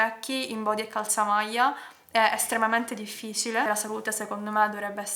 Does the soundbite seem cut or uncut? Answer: cut